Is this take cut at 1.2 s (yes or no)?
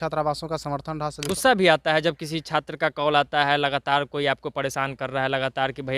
yes